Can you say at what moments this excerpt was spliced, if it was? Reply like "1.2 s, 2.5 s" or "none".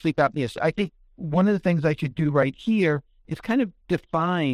none